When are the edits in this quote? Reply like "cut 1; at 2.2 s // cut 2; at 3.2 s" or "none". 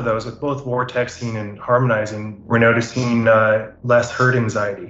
cut 1; at 3.7 s